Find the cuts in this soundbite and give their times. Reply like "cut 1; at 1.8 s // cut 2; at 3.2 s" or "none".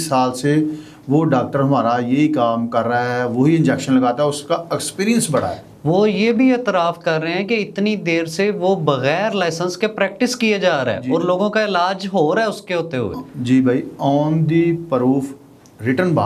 none